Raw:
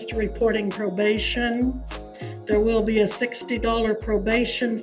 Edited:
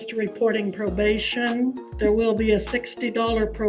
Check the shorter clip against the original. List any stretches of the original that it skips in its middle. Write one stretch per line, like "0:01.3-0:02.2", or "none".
0:01.9-0:02.3